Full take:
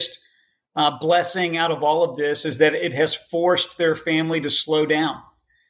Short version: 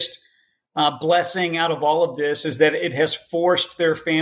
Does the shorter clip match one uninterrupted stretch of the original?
yes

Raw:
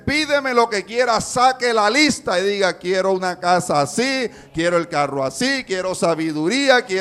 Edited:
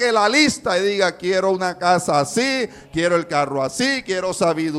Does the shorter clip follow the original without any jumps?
yes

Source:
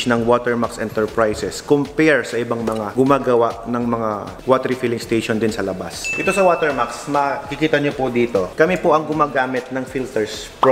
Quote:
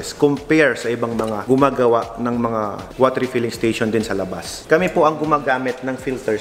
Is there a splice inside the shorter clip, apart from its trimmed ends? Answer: yes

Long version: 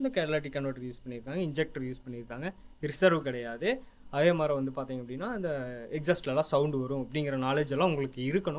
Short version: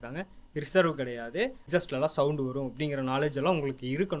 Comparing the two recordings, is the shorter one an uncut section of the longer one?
no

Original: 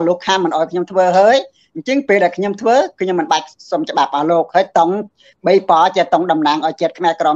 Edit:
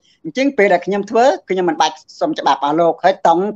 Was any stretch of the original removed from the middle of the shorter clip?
no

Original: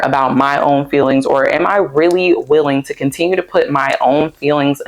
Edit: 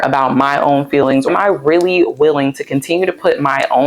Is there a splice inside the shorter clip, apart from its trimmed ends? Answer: yes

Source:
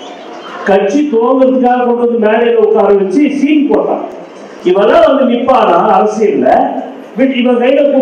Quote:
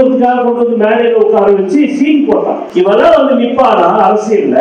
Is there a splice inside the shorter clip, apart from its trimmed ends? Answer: yes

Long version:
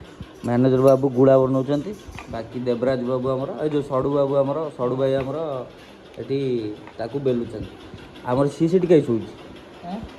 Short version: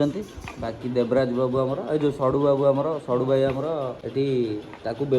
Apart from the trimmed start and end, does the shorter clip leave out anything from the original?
yes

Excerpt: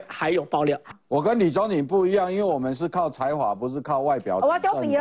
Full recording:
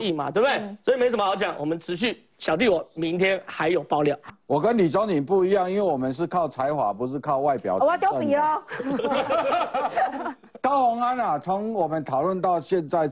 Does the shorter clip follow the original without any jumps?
yes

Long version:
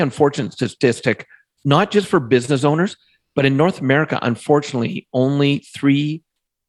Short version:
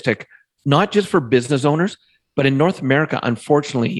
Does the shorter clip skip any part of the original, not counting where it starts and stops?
no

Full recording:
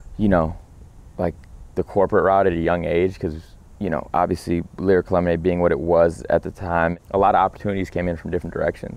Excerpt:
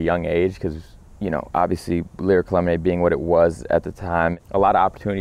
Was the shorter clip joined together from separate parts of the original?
no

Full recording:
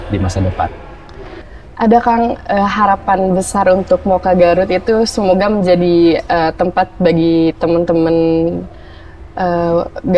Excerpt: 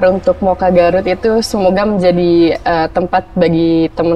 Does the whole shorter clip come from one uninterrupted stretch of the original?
yes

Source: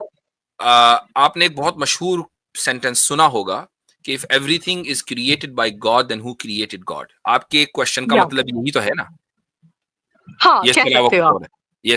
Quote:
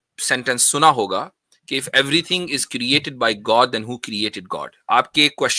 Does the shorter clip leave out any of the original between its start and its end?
no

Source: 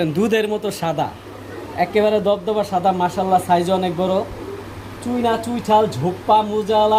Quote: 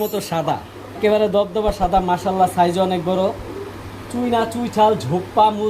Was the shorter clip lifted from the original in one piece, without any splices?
no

